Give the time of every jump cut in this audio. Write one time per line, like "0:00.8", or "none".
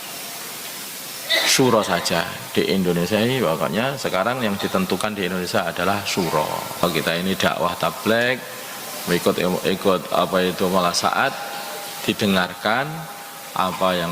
0:06.8